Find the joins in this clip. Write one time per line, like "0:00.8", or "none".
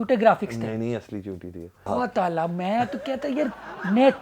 0:01.9